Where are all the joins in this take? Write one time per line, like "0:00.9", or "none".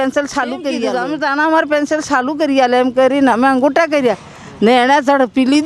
0:00.9